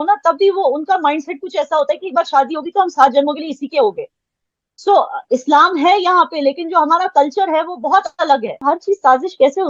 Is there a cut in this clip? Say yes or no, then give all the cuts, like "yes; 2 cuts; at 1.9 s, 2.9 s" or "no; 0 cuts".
yes; 1 cut; at 8.6 s